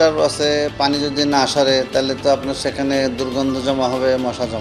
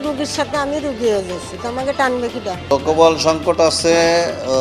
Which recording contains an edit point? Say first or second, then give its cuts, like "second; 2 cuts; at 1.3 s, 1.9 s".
second; 1 cut; at 2.7 s